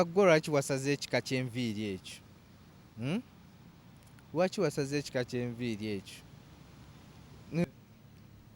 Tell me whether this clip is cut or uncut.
cut